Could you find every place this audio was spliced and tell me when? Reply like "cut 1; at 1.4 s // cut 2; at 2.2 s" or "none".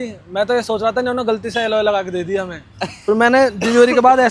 none